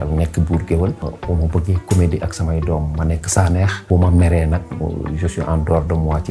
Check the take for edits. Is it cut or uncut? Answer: cut